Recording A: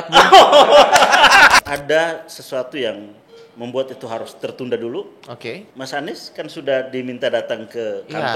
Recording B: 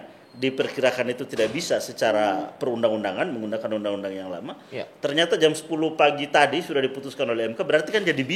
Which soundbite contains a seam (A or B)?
A